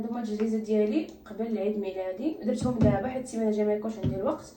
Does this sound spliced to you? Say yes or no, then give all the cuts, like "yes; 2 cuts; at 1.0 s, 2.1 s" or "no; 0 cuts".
no; 0 cuts